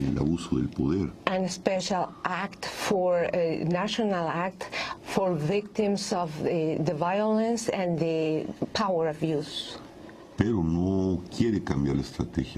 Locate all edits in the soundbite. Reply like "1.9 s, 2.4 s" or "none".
9.9 s